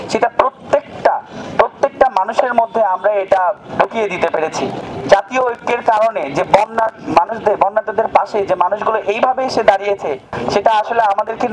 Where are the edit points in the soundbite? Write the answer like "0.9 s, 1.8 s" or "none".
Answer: none